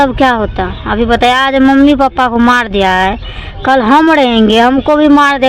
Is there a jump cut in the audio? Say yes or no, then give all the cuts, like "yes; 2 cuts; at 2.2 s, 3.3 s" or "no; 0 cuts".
no; 0 cuts